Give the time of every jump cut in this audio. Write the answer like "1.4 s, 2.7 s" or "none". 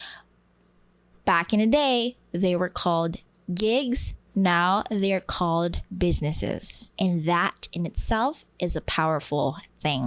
5.8 s, 6.8 s